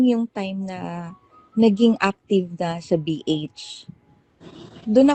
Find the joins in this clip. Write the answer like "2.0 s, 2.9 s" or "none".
none